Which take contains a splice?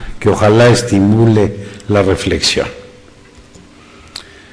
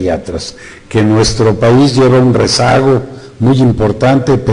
second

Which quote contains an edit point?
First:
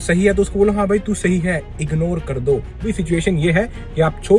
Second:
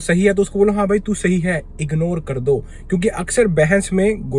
first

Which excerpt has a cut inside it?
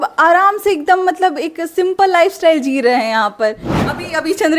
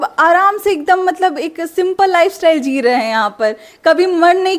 first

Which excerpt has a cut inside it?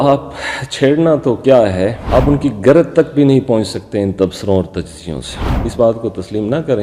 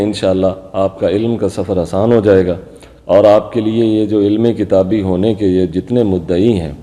first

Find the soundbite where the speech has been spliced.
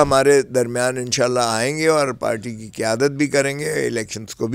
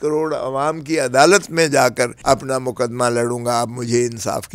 second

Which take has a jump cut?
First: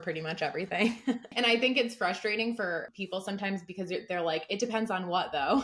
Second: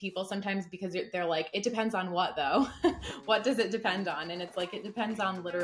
first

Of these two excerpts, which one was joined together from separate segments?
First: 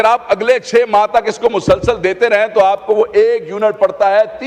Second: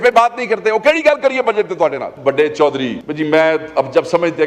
second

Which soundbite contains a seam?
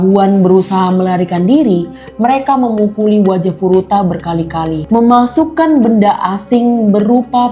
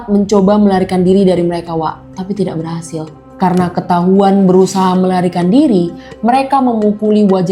first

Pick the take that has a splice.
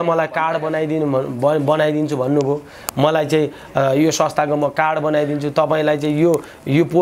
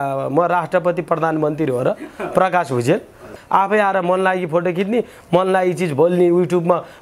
second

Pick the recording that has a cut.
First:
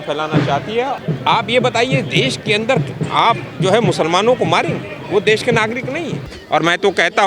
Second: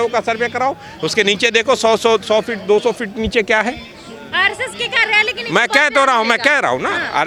first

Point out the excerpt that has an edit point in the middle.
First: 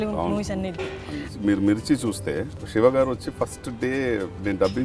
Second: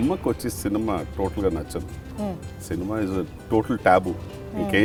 first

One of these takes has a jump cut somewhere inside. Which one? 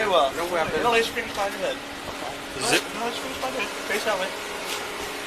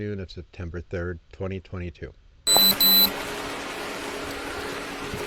second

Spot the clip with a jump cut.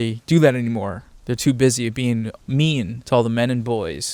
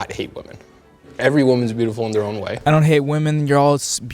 second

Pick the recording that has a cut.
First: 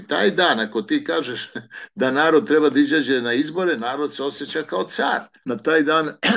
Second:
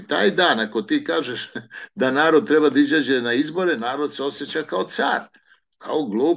first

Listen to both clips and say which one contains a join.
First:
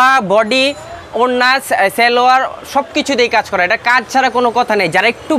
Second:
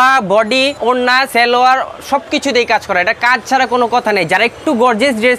second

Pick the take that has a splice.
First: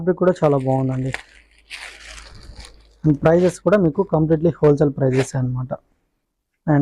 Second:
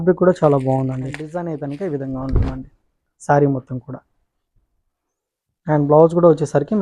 second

